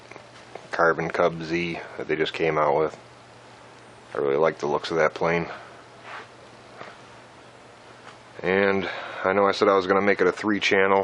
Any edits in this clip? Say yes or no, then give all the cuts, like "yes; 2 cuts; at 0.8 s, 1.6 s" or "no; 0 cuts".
no; 0 cuts